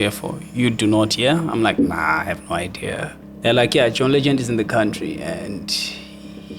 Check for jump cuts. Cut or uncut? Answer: cut